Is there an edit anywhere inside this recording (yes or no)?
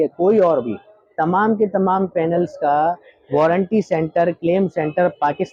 no